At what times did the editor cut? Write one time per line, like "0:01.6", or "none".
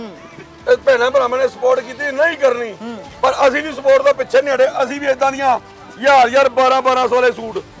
none